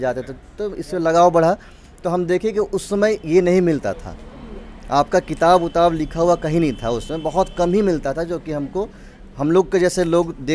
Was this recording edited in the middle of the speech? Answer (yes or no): no